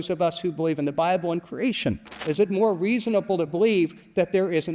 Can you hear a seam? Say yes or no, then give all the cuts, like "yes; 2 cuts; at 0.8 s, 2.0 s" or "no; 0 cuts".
yes; 1 cut; at 2.1 s